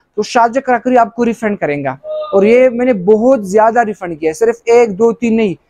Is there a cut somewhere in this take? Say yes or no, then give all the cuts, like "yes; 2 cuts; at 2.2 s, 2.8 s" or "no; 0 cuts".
no; 0 cuts